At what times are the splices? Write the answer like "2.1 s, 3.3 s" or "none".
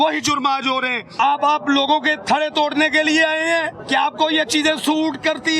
1.2 s, 3.8 s